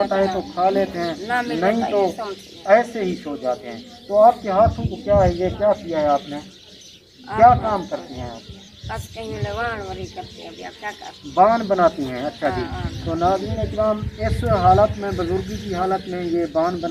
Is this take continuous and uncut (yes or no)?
yes